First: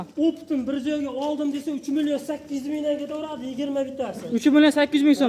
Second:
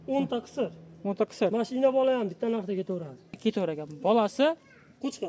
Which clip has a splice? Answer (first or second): second